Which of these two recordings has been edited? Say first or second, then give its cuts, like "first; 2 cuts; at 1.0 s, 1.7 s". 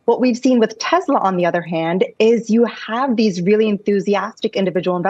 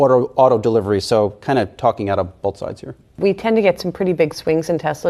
second; 1 cut; at 3.2 s